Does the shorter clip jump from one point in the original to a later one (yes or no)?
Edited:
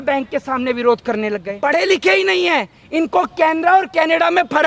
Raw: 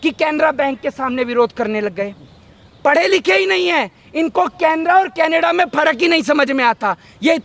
yes